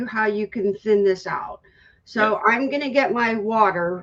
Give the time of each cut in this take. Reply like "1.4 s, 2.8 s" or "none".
none